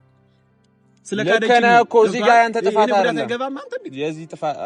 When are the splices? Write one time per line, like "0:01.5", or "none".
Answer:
none